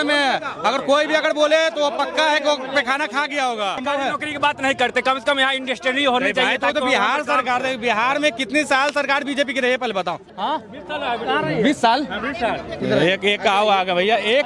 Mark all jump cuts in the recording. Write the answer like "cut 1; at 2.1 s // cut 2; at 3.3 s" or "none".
cut 1; at 3.8 s // cut 2; at 10.3 s